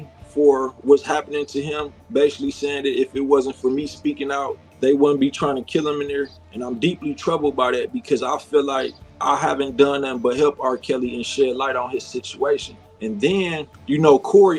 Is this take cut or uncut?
uncut